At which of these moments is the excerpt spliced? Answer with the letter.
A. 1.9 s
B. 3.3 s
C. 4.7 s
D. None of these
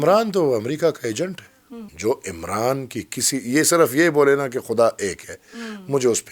A